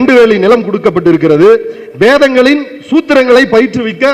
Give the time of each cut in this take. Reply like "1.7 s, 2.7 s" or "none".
none